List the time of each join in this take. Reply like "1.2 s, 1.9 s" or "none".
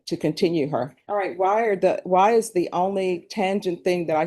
1.0 s